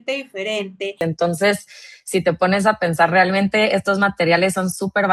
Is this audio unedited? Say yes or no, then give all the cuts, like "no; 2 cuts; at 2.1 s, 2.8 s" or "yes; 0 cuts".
no; 1 cut; at 1.0 s